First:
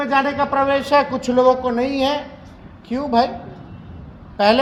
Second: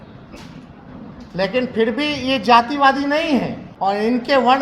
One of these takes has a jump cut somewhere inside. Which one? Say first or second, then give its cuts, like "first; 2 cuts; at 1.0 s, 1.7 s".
second; 1 cut; at 3.6 s